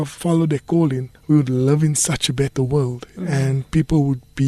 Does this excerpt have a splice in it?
yes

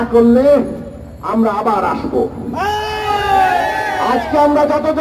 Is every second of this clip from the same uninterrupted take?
yes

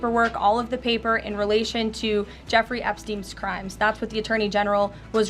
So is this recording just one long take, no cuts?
yes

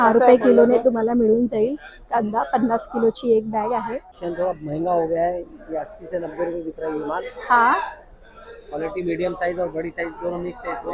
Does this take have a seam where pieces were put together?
yes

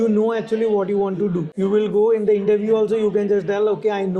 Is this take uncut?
no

